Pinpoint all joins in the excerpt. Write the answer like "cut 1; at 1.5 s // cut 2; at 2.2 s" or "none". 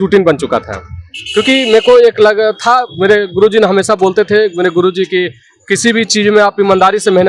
none